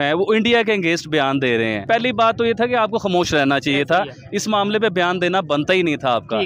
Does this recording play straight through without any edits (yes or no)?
no